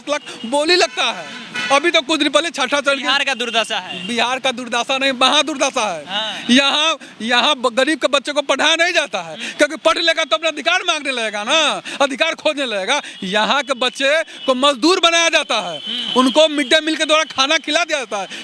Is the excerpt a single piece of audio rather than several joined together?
yes; 0 cuts

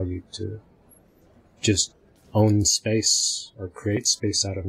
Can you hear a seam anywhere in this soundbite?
no; 0 cuts

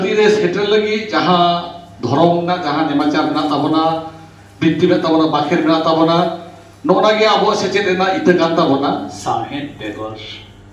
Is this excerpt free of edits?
no; 1 cut; at 9.1 s

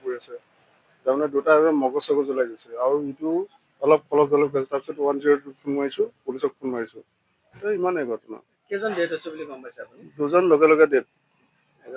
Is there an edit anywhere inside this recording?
no; 0 cuts

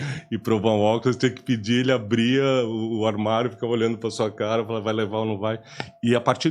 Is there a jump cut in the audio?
no; 0 cuts

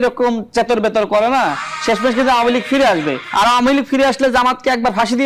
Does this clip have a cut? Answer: yes; 1 cut; at 3.2 s

